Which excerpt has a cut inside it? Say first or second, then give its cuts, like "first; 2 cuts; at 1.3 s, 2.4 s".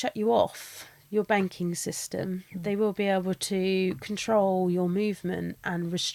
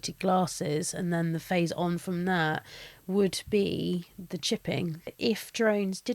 second; 1 cut; at 5.1 s